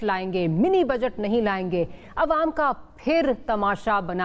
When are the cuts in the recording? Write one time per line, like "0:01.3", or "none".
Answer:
0:02.0